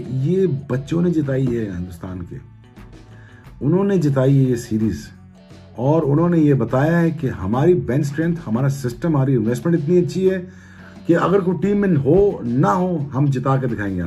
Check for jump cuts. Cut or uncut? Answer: uncut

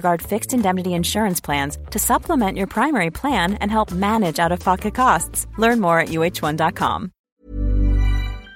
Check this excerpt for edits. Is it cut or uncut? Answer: cut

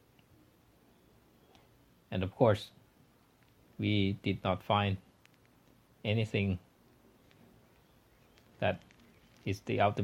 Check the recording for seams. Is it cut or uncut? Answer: cut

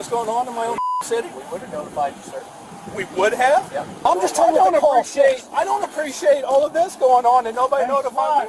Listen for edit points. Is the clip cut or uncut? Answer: cut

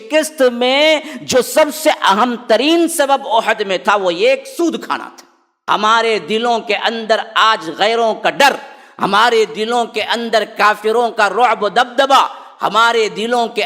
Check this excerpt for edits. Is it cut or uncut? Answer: cut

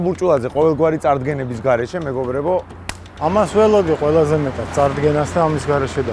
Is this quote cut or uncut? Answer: cut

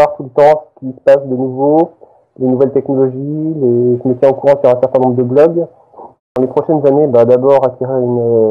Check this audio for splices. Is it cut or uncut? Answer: cut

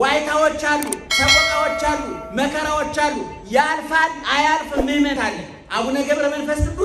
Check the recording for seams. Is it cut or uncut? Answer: cut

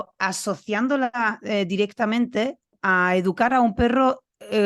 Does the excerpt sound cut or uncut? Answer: cut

